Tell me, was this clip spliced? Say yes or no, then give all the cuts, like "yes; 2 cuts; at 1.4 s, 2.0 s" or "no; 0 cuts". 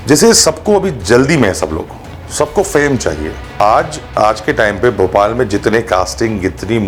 yes; 1 cut; at 3.6 s